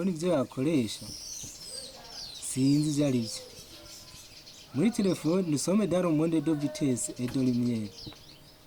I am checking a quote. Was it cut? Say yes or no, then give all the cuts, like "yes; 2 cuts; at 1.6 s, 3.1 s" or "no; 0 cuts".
no; 0 cuts